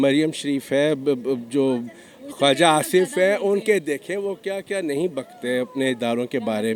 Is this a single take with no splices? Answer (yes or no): yes